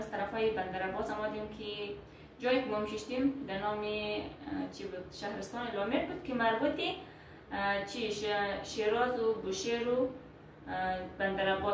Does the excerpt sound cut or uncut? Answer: uncut